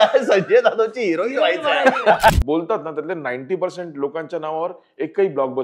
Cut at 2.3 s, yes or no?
yes